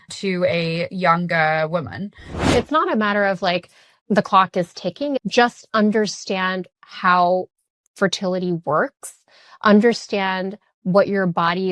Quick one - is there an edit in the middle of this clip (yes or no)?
yes